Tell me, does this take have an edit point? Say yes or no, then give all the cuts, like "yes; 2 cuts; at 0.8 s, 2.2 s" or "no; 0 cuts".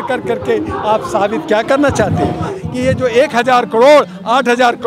yes; 1 cut; at 2.6 s